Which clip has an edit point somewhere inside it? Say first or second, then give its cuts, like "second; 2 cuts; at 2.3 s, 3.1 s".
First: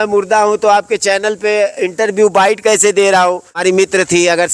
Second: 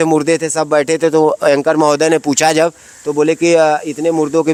first; 1 cut; at 3.6 s